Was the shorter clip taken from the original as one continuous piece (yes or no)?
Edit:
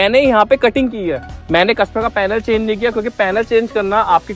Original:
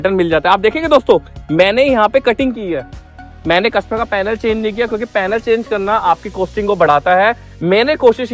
no